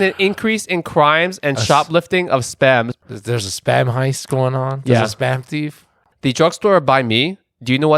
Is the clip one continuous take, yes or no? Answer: no